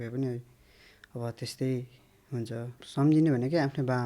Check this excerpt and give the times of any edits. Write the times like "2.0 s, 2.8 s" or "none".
2.8 s